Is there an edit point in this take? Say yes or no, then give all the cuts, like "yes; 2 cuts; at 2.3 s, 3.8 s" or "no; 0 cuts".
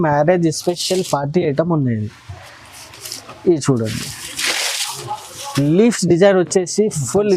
no; 0 cuts